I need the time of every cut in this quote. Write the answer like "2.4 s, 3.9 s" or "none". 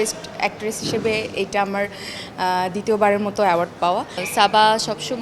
4.2 s

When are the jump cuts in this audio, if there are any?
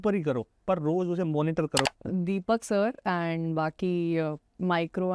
1.9 s

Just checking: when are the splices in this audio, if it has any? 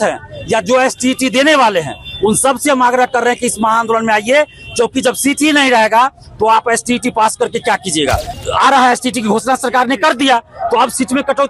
8.3 s

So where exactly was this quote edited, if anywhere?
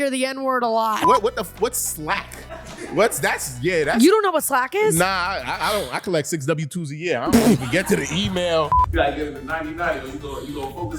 1.0 s, 8.8 s

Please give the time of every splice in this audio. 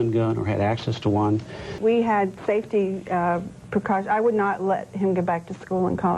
1.7 s

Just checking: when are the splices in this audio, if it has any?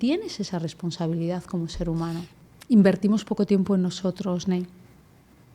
2.3 s

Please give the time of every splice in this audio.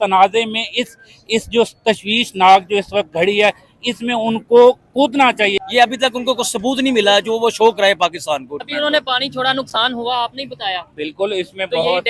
5.6 s, 8.7 s

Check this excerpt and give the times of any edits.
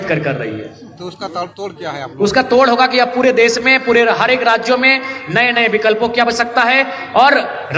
none

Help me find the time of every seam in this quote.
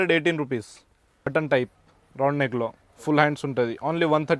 1.3 s

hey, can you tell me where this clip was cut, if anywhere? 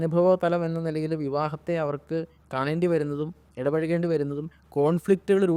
none

